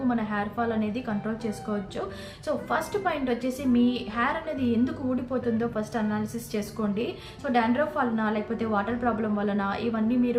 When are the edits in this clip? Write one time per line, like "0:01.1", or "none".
none